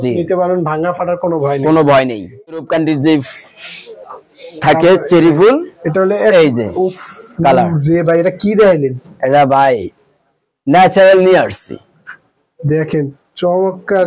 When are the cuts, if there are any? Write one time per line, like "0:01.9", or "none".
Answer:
0:02.6